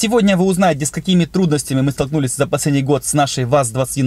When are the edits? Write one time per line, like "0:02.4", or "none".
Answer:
none